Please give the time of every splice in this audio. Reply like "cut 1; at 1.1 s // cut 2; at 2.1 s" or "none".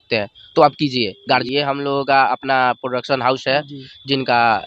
cut 1; at 1.4 s